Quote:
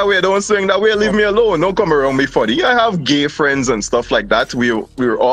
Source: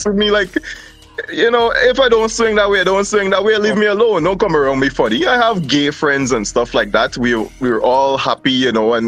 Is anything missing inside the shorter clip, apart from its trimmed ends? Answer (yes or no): no